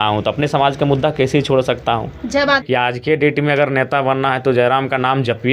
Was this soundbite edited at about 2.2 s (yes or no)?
yes